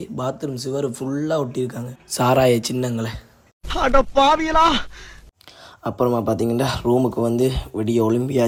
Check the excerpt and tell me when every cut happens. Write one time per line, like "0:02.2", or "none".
none